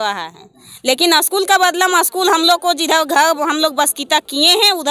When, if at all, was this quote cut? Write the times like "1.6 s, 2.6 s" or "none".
none